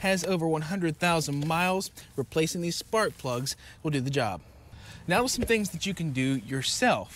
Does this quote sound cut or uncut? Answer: cut